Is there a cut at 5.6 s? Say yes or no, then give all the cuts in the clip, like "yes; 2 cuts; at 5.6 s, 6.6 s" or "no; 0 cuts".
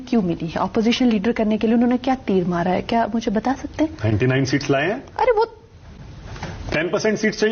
yes; 1 cut; at 5.6 s